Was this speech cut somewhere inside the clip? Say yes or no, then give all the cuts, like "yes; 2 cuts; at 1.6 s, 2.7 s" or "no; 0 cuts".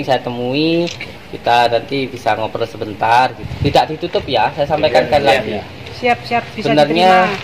yes; 1 cut; at 3.5 s